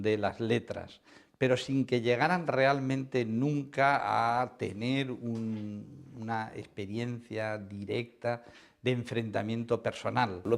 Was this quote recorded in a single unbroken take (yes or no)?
yes